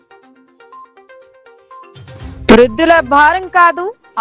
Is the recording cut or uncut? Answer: cut